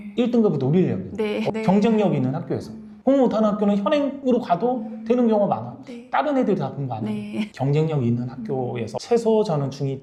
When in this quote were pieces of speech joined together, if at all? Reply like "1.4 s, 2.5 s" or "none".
none